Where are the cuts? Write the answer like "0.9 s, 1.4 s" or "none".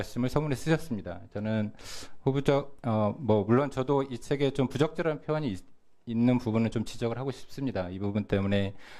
2.4 s